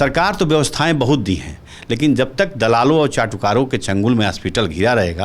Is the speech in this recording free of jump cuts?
yes; 0 cuts

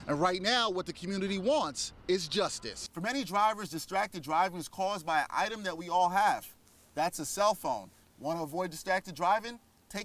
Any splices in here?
yes; 1 cut; at 2.7 s

